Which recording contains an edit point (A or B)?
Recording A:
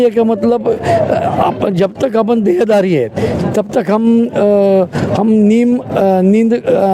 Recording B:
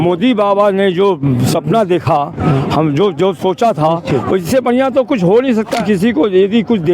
B